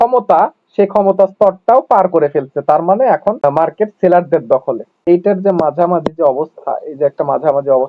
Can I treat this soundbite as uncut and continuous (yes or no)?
no